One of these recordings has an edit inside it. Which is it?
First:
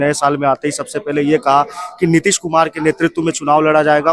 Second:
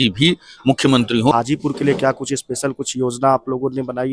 second; 1 cut; at 1.3 s

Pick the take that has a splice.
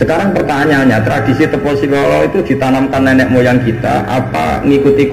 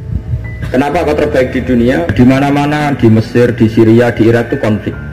second; 1 cut; at 2.1 s

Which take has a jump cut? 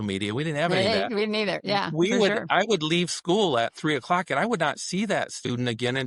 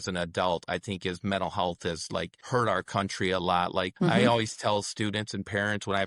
second; 2 cuts; at 2.4 s, 3.9 s

